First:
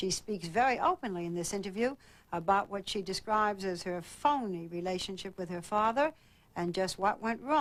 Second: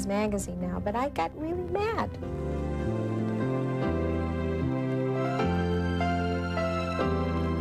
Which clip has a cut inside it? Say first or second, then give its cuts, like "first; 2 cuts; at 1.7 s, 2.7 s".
second; 1 cut; at 3.1 s